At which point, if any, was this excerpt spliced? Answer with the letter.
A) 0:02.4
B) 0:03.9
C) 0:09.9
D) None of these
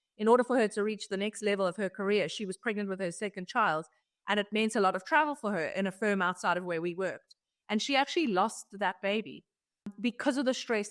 C